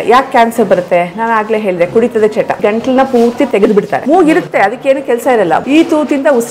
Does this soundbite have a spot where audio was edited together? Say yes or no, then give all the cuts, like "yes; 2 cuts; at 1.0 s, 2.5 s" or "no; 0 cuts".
yes; 3 cuts; at 2.6 s, 4.0 s, 5.6 s